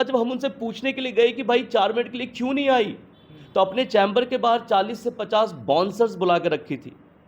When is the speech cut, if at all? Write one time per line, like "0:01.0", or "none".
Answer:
none